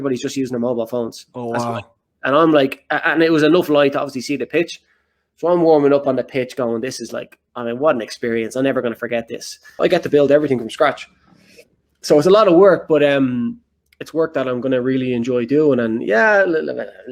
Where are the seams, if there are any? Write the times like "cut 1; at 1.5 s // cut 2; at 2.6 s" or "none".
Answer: cut 1; at 9.7 s